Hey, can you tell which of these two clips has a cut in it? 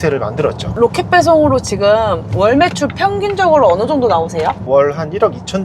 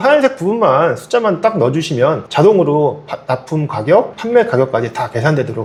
first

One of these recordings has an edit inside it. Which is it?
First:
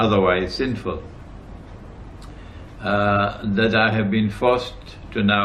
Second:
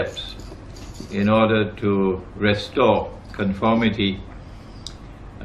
first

